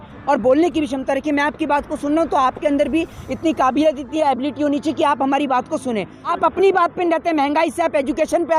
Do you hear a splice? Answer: yes; 1 cut; at 6.3 s

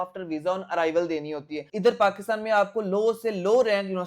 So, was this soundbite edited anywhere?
yes; 1 cut; at 1.6 s

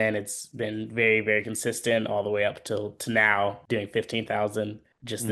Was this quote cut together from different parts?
yes; 1 cut; at 3.6 s

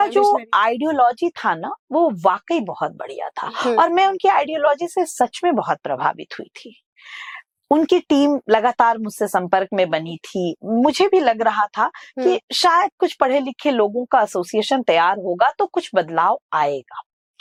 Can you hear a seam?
no; 0 cuts

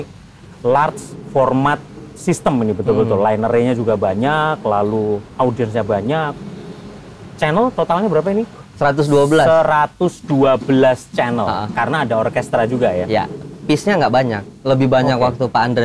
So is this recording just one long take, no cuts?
yes; 0 cuts

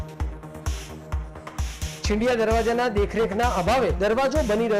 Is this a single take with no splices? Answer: no; 1 cut; at 2.0 s

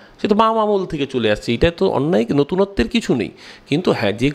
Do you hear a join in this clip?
no; 0 cuts

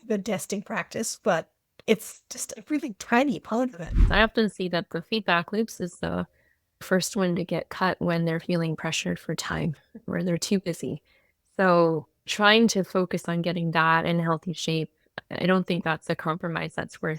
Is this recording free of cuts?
no; 1 cut; at 4.0 s

